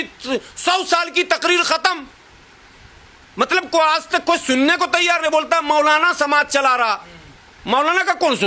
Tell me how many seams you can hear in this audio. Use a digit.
0